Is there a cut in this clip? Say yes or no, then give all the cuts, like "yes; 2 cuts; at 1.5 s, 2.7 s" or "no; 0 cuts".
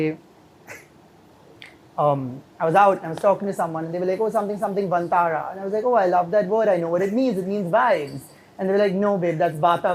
no; 0 cuts